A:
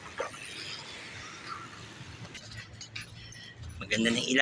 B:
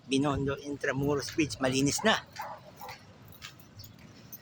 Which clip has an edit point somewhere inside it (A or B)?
A